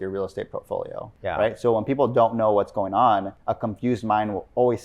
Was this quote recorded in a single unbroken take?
no; 2 cuts; at 1.1 s, 3.4 s

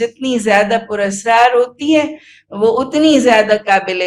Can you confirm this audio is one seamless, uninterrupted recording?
yes; 0 cuts

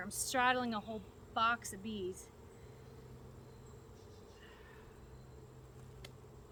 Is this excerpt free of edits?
yes; 0 cuts

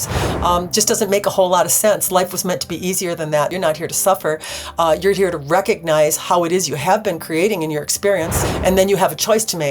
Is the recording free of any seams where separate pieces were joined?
no; 2 cuts; at 3.5 s, 8.4 s

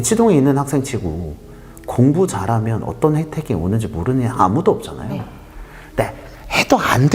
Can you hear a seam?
no; 0 cuts

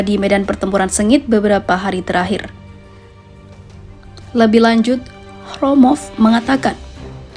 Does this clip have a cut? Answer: yes; 2 cuts; at 2.5 s, 4.3 s

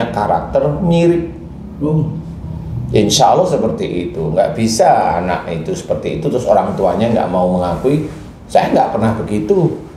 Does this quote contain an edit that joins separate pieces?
no; 0 cuts

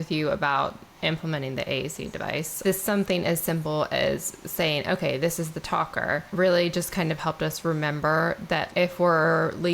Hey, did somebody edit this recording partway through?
yes; 3 cuts; at 2.5 s, 6.3 s, 8.7 s

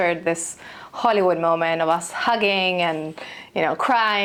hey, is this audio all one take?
yes; 0 cuts

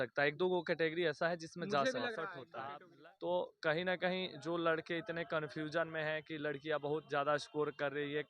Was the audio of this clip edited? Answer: yes; 1 cut; at 2.5 s

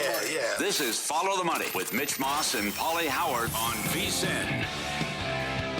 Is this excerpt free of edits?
yes; 0 cuts

